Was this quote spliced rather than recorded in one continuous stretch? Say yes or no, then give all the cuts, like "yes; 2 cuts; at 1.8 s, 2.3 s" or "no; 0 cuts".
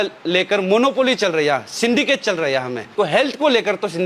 yes; 1 cut; at 2.9 s